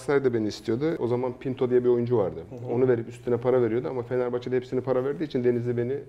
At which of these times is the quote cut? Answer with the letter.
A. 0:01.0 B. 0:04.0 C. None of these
A